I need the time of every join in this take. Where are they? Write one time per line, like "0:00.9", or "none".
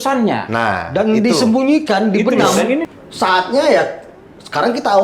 0:02.8